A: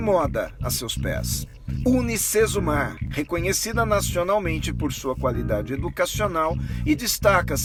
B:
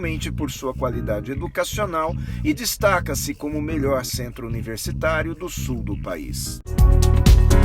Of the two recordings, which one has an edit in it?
B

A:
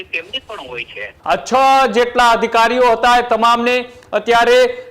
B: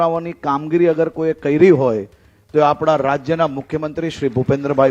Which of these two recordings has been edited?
A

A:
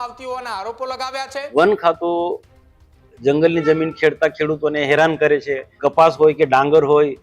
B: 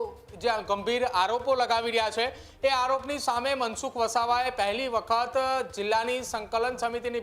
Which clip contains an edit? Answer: A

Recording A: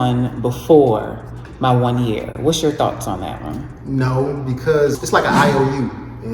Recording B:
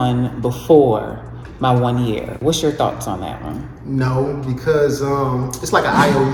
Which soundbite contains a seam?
A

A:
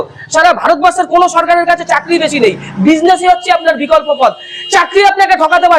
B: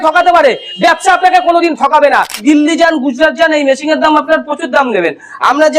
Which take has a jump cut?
B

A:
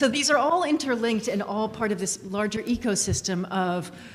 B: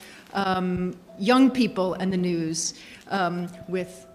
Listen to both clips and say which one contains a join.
B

